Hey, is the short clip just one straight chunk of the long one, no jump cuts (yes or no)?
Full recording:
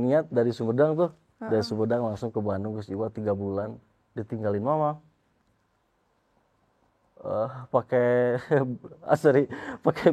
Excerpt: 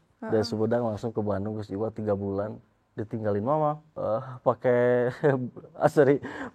no